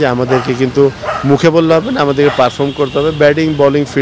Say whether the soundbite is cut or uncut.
uncut